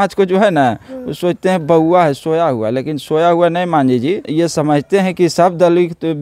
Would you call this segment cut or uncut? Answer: cut